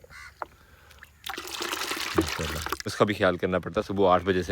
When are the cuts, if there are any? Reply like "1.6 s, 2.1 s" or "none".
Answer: 2.7 s